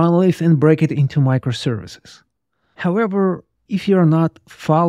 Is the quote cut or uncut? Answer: uncut